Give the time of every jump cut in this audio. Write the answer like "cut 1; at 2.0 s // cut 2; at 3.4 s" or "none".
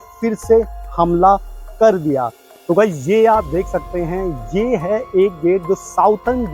cut 1; at 2.4 s